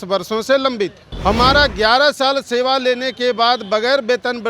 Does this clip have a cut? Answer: yes; 1 cut; at 1.1 s

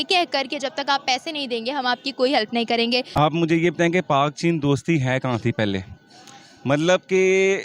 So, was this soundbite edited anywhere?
yes; 1 cut; at 3.1 s

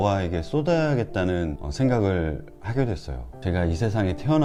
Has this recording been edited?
no; 0 cuts

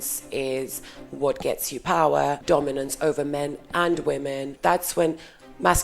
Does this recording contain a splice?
yes; 2 cuts; at 2.4 s, 4.5 s

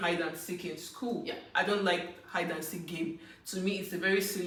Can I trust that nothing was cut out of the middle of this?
yes; 0 cuts

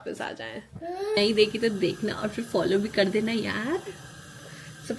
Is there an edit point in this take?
yes; 1 cut; at 1.2 s

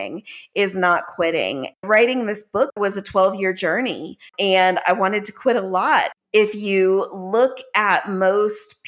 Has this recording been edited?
yes; 4 cuts; at 1.8 s, 2.7 s, 4.3 s, 6.1 s

